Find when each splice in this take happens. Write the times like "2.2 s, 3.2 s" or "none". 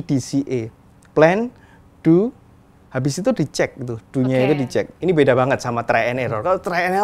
4.9 s